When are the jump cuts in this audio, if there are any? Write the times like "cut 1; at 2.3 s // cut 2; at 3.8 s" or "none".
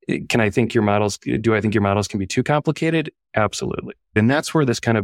cut 1; at 4.1 s